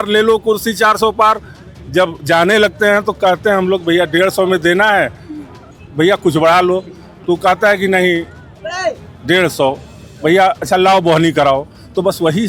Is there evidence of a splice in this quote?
no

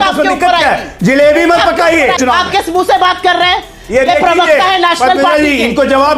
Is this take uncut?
no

